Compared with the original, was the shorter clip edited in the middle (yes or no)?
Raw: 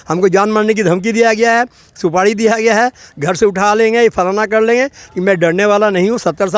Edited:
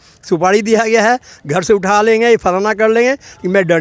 no